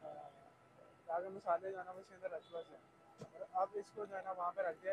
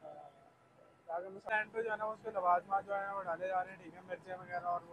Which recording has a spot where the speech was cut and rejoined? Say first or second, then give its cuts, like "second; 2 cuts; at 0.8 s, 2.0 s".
second; 1 cut; at 1.5 s